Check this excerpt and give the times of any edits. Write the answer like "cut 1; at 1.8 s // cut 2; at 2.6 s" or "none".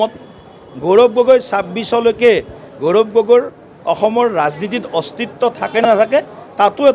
none